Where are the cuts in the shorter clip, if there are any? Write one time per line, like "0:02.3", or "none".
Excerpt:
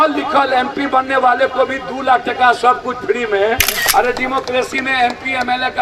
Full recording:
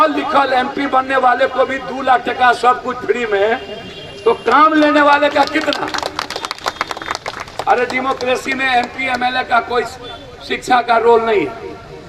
0:03.8